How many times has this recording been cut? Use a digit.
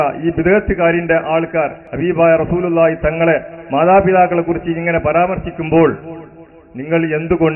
1